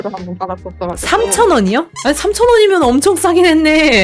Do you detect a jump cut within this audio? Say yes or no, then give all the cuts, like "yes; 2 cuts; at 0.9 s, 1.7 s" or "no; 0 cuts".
yes; 1 cut; at 1.9 s